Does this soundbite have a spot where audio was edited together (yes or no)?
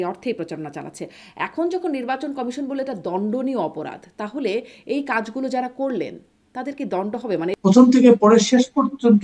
yes